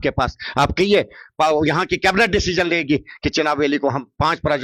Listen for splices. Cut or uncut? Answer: uncut